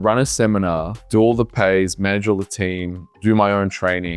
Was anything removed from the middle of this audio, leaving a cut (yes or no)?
yes